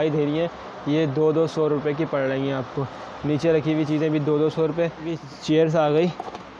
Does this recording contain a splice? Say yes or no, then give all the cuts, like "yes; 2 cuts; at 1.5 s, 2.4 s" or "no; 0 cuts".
yes; 1 cut; at 5.2 s